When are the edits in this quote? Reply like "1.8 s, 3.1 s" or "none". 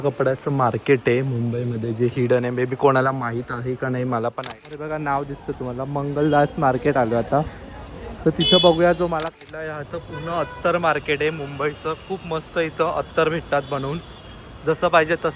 4.5 s, 9.3 s